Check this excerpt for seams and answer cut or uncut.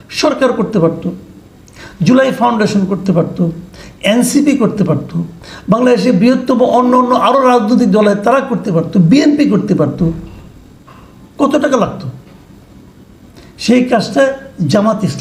uncut